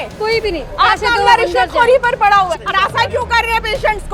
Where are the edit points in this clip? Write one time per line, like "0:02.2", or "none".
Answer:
0:02.5